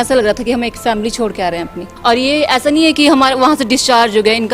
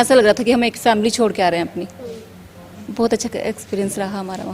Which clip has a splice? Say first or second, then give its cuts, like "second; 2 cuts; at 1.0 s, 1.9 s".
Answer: first; 1 cut; at 1.9 s